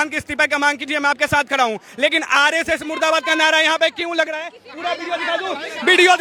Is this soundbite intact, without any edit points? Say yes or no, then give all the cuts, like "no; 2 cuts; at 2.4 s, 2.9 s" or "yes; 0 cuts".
yes; 0 cuts